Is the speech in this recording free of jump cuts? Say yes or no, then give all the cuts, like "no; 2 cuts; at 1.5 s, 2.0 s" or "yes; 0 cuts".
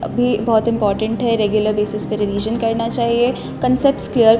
yes; 0 cuts